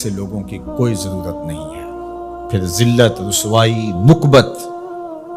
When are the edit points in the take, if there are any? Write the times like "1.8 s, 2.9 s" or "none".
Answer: none